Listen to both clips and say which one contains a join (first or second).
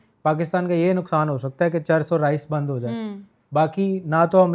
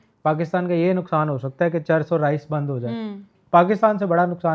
second